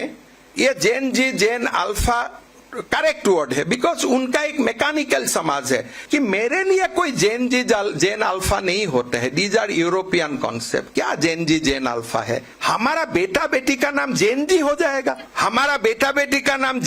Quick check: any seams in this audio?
yes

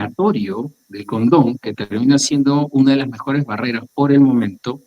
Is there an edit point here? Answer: no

